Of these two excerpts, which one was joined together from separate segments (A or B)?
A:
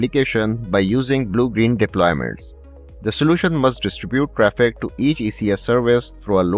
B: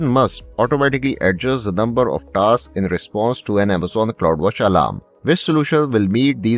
B